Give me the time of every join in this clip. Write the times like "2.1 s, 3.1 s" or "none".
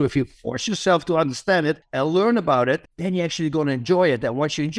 1.8 s, 2.9 s